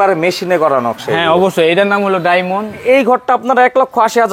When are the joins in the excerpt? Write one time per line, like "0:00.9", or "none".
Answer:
0:02.8